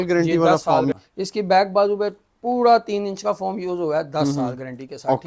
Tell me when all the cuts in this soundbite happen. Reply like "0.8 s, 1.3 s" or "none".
0.9 s